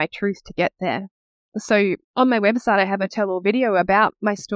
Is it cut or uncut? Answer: uncut